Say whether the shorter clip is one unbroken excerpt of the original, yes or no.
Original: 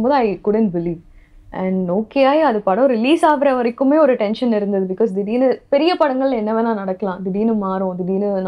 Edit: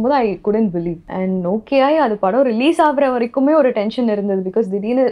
no